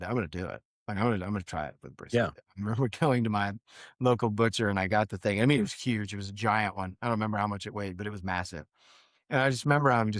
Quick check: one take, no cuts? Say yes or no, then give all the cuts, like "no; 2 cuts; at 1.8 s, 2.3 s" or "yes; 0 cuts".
yes; 0 cuts